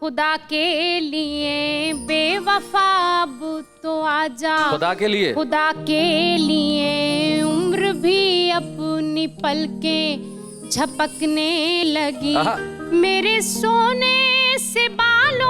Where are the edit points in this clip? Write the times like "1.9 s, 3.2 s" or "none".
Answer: none